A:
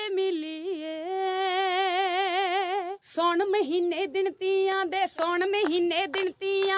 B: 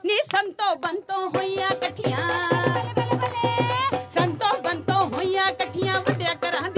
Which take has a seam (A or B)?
A